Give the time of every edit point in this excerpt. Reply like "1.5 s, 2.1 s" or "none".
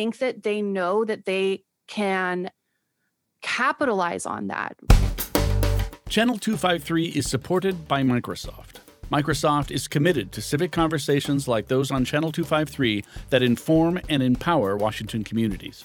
4.8 s